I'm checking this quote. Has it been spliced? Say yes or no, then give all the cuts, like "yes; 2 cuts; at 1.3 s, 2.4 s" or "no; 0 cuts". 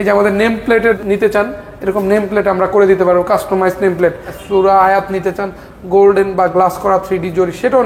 yes; 2 cuts; at 1.0 s, 4.3 s